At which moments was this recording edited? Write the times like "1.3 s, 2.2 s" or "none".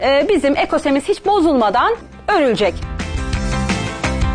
2.1 s, 2.9 s